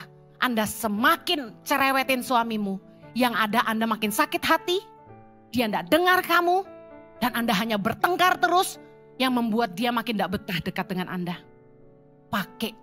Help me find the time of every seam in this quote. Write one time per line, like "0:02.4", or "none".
none